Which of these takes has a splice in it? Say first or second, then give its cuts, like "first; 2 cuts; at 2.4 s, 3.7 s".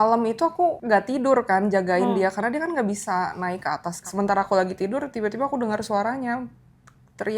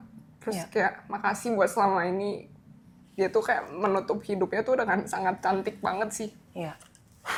first; 2 cuts; at 0.8 s, 4.0 s